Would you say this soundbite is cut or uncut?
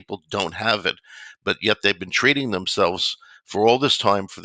uncut